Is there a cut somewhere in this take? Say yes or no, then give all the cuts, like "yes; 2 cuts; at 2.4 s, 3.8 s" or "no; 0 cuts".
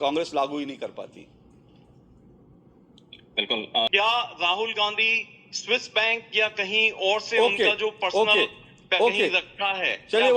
yes; 1 cut; at 3.9 s